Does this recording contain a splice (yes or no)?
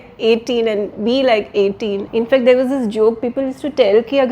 yes